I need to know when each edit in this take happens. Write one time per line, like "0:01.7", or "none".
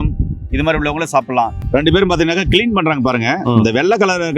0:01.6